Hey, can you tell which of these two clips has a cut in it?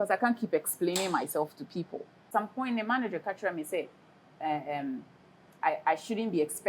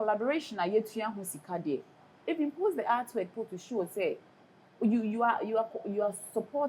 first; 1 cut; at 2.3 s

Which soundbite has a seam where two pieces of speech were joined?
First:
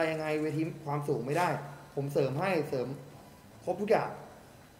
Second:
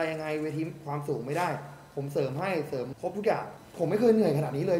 second; 2 cuts; at 2.9 s, 3.6 s

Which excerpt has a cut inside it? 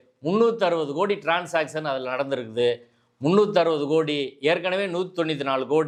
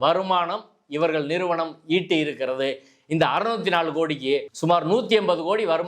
second; 1 cut; at 4.5 s

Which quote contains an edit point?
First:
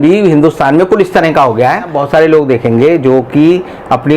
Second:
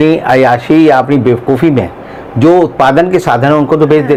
first; 1 cut; at 2.0 s

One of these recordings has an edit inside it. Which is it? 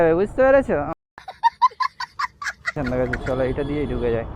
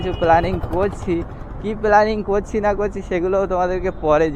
first; 1 cut; at 2.7 s

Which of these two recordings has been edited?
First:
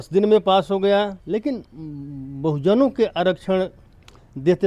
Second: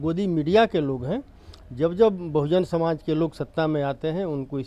first; 1 cut; at 1.2 s

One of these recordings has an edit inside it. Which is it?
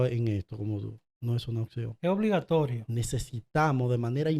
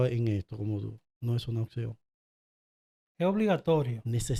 first; 1 cut; at 1.9 s

